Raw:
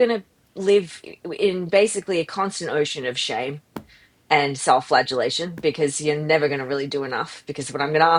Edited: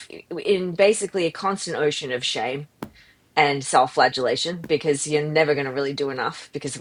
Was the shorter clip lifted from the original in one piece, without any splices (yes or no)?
yes